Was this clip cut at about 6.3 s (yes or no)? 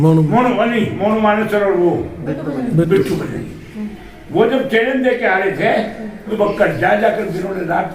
yes